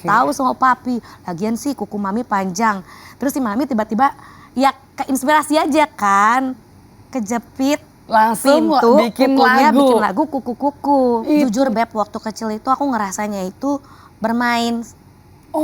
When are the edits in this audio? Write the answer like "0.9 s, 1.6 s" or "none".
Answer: 11.4 s